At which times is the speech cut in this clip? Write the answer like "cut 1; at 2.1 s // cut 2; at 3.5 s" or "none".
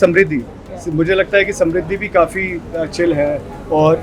none